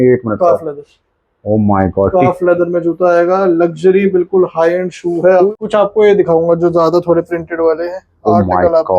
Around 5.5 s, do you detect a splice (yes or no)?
yes